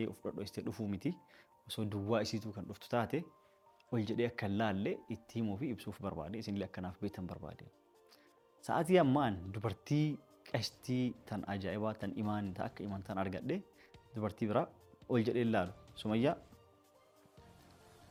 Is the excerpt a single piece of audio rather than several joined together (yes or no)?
yes